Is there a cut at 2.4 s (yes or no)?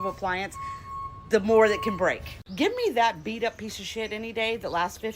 yes